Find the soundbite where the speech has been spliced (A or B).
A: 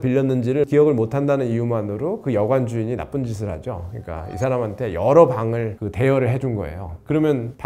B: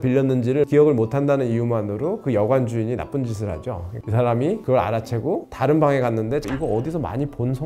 B